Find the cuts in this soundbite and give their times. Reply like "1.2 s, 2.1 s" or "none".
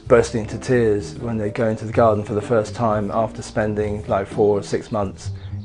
none